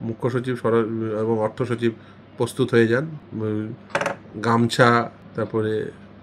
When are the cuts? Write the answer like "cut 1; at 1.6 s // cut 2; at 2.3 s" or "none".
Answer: cut 1; at 3.2 s // cut 2; at 5.2 s